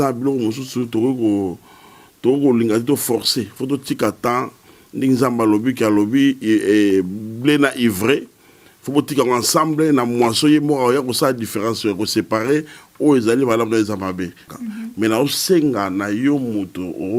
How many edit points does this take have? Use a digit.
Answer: 1